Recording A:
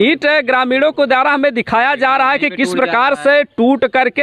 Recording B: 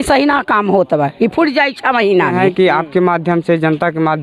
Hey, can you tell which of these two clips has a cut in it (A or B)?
B